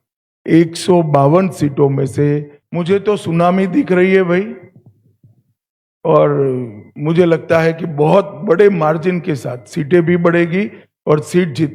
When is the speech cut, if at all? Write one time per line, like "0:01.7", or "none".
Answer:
0:02.6

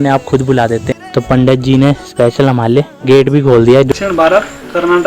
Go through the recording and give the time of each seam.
0:00.9
0:02.9
0:03.9

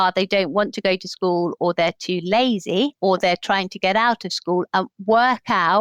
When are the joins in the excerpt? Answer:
none

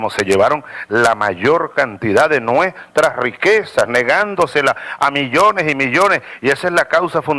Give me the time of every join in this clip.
0:02.8

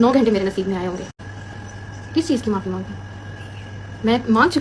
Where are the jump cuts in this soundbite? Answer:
0:01.1

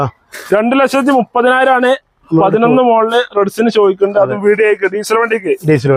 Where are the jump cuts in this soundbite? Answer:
none

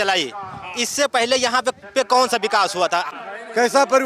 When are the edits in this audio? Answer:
0:03.1

